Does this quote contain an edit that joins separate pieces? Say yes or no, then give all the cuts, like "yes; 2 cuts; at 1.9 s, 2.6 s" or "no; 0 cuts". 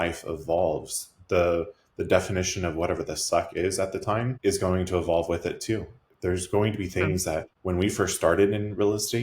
yes; 2 cuts; at 4.3 s, 7.5 s